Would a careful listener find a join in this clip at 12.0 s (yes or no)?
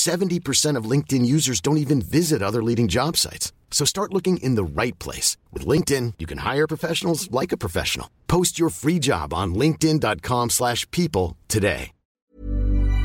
yes